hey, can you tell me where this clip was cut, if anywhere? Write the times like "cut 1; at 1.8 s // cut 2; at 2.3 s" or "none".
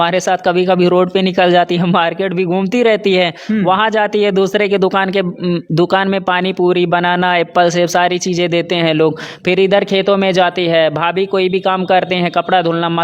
none